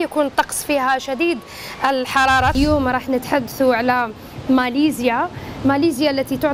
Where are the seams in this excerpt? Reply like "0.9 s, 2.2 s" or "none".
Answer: 2.5 s